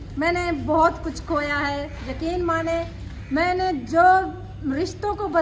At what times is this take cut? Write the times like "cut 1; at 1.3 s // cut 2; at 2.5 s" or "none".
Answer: none